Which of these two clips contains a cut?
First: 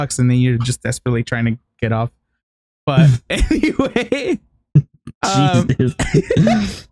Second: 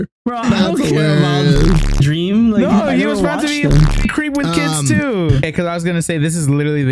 second; 1 cut; at 5.5 s

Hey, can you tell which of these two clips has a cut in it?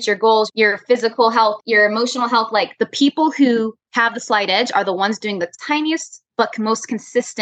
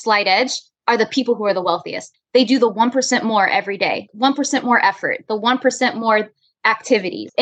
second; 1 cut; at 4.1 s

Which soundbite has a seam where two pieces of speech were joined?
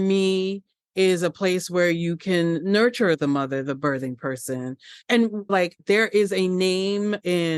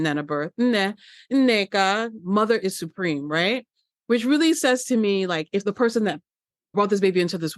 second; 2 cuts; at 5.6 s, 6.7 s

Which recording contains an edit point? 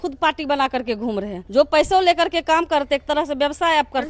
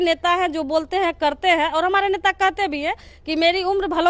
first; 1 cut; at 1.4 s

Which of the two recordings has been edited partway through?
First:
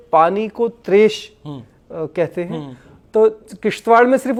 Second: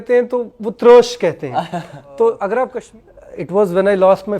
second; 1 cut; at 2.8 s

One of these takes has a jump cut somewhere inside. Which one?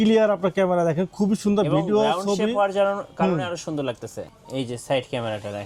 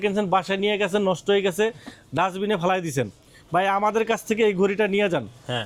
first; 1 cut; at 4.1 s

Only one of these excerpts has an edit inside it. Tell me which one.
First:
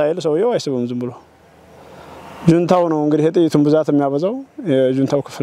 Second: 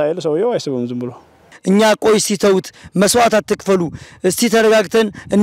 second; 1 cut; at 1.5 s

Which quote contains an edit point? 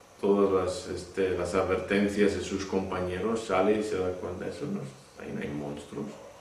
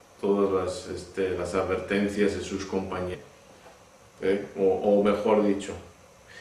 first; 1 cut; at 3.2 s

